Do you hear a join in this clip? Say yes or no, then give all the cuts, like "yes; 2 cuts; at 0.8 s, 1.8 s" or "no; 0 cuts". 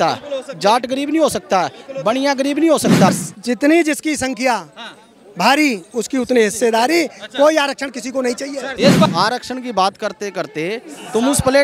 yes; 2 cuts; at 3.1 s, 9.1 s